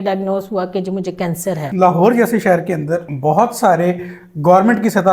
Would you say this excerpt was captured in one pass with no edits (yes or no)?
no